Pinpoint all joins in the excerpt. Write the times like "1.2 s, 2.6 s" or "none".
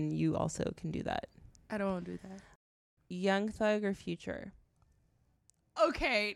2.5 s